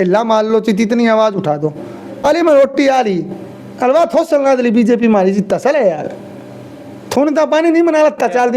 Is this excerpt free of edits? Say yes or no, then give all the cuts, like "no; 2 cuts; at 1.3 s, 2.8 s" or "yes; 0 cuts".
no; 1 cut; at 2.2 s